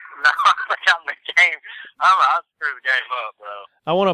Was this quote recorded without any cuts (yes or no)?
yes